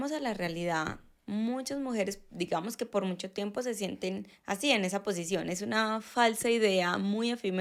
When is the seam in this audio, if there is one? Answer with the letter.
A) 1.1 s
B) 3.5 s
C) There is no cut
C